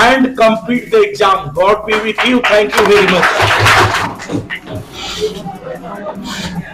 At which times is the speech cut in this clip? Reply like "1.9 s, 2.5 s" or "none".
4.0 s